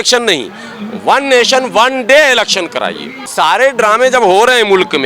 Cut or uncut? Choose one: cut